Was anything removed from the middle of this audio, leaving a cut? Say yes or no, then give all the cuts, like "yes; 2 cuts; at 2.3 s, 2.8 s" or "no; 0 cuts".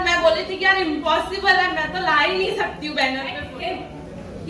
yes; 1 cut; at 3.5 s